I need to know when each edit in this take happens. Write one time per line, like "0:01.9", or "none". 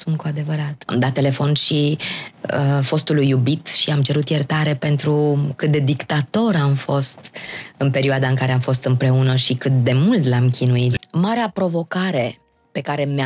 0:00.9
0:11.0

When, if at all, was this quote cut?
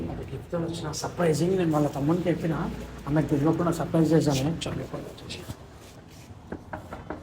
0:06.0

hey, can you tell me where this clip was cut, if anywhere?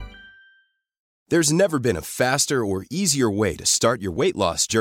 0:01.0

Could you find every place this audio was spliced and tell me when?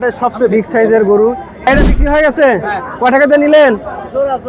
0:01.7

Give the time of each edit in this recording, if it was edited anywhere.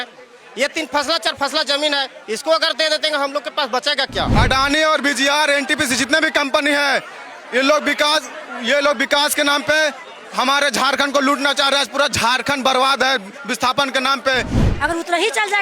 0:04.3
0:14.6

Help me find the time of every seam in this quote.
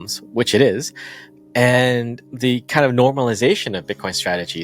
0:02.2

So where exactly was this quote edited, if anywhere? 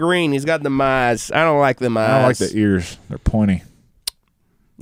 none

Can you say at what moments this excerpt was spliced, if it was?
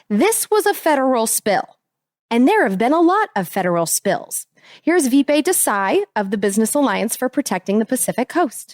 none

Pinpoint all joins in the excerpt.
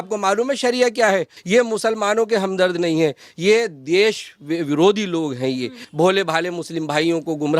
0:01.3
0:05.8

